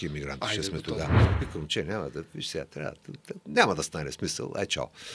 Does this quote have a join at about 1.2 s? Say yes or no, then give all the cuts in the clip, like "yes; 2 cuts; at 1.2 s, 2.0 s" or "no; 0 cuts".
yes; 1 cut; at 1.2 s